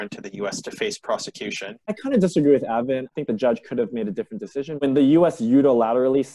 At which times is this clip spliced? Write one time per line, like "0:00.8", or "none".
0:01.7
0:03.1
0:04.7